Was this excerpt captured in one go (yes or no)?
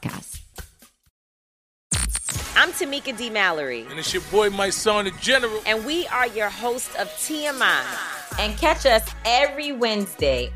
no